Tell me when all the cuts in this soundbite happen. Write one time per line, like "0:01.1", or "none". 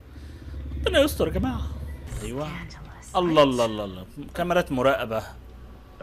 0:02.1